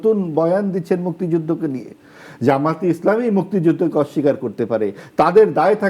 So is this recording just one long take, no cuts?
yes; 0 cuts

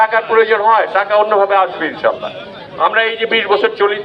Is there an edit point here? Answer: no; 0 cuts

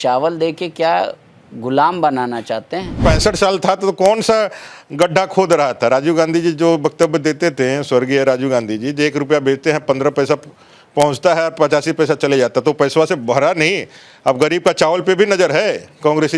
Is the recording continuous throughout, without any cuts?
no; 1 cut; at 3.0 s

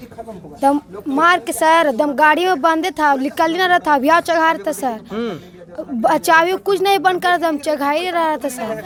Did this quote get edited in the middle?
no; 0 cuts

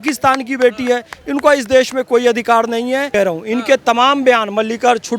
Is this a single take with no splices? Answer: no; 1 cut; at 3.1 s

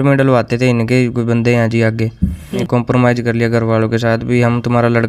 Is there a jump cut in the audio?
yes; 1 cut; at 2.5 s

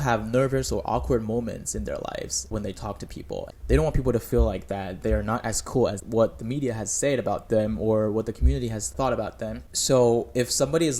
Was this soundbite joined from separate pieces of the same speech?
yes; 1 cut; at 8.9 s

